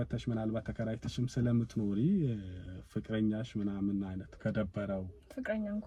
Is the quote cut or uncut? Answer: uncut